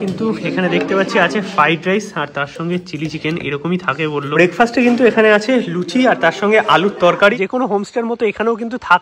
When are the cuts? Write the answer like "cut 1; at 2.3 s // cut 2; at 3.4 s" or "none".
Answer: cut 1; at 4.3 s // cut 2; at 7.3 s